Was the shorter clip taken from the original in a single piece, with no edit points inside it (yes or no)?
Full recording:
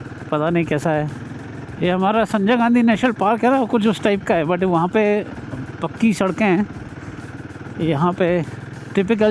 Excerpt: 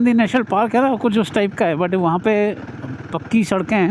yes